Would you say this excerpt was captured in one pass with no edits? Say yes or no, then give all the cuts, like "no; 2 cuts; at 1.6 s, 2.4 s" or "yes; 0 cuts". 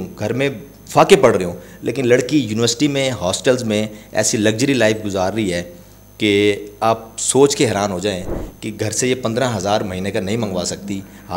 yes; 0 cuts